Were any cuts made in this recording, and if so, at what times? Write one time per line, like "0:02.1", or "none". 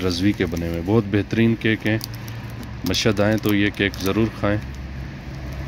none